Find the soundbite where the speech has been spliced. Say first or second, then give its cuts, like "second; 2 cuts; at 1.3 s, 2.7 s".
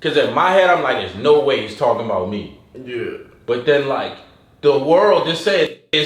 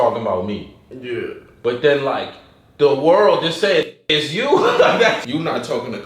second; 1 cut; at 5.1 s